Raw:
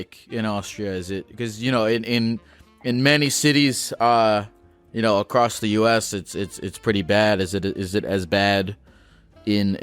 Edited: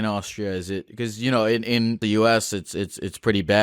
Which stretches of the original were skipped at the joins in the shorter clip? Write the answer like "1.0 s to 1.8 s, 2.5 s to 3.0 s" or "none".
2.4 s to 5.6 s

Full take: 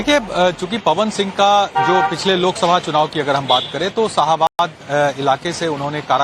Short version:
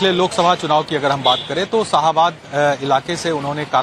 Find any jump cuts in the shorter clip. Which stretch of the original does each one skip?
4.5 s to 4.6 s

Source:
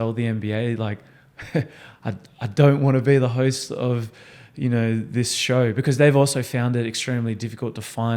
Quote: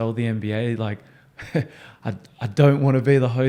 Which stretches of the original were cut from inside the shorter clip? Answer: none

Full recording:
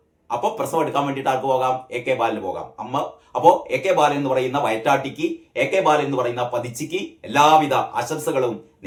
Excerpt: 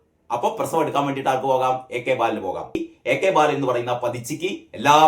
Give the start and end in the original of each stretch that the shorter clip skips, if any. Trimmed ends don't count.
2.8 s to 5.3 s

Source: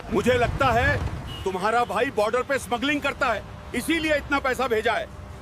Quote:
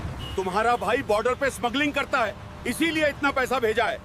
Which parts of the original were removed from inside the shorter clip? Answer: none

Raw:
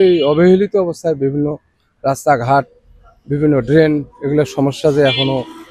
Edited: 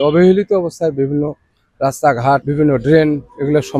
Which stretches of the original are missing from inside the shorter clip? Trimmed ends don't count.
2.7 s to 3.3 s

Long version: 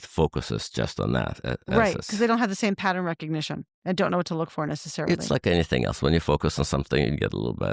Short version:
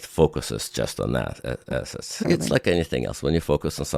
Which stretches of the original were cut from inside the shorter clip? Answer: 1.7 s to 4.5 s

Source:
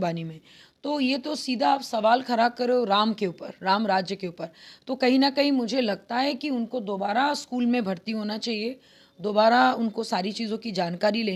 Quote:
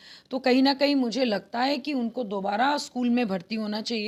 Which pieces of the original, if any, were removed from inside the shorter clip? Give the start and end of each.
none

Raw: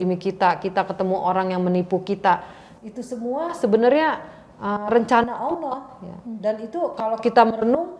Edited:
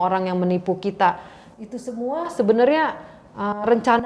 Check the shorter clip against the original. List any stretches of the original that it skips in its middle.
none

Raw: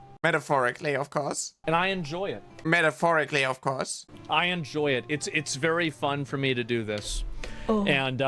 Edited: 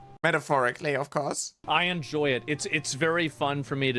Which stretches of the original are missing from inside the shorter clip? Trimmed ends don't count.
1.5 s to 4.1 s

